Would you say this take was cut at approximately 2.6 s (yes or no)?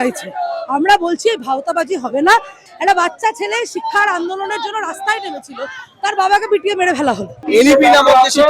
yes